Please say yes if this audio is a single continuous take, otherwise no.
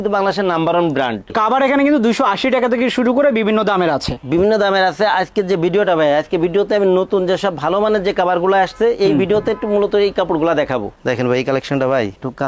no